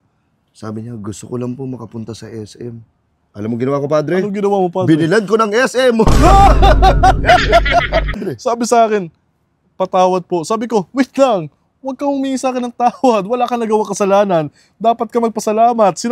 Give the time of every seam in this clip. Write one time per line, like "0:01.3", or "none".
0:08.2